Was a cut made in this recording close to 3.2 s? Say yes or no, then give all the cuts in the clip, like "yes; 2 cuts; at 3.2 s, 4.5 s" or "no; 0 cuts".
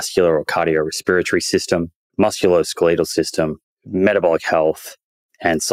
no; 0 cuts